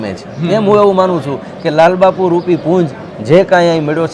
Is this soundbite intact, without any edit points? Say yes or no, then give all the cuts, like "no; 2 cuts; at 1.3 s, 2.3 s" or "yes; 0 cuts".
yes; 0 cuts